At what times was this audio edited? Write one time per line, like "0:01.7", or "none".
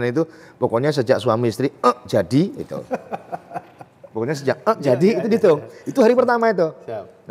none